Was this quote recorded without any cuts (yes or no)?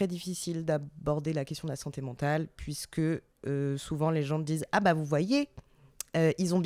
yes